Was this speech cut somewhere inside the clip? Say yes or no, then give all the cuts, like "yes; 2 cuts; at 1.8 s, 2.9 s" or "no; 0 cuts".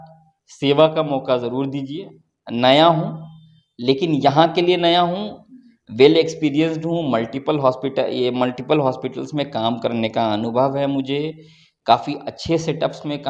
no; 0 cuts